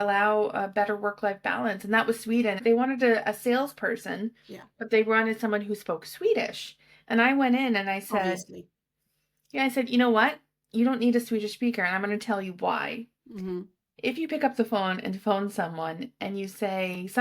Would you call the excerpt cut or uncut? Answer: cut